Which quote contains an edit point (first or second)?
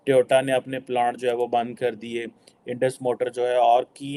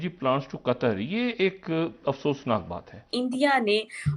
second